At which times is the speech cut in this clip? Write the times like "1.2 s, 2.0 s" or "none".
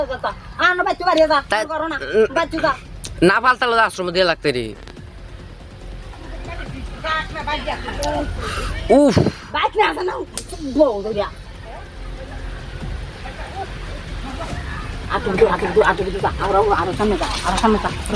none

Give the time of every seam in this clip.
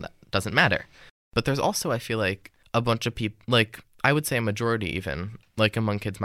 1.2 s, 2.5 s

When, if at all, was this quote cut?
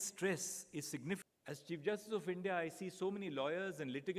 1.2 s

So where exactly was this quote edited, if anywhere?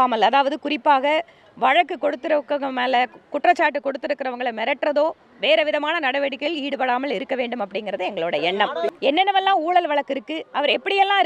8.9 s

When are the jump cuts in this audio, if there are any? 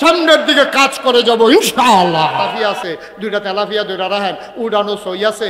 2.5 s

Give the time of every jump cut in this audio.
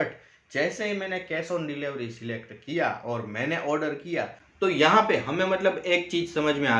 4.4 s

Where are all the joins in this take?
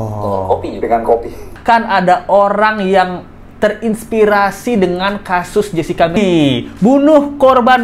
1.5 s, 6.2 s

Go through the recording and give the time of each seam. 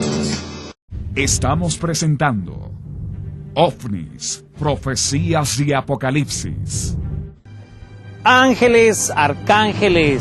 none

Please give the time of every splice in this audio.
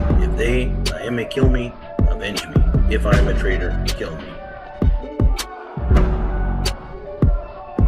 4.4 s

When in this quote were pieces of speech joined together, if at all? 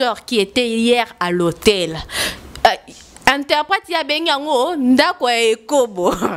none

